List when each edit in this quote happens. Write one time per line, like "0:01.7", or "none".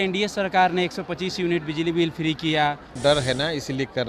0:03.0